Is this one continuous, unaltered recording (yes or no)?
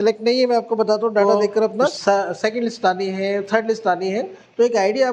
no